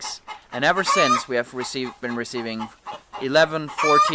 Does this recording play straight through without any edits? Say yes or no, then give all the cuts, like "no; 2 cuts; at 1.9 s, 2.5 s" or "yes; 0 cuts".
yes; 0 cuts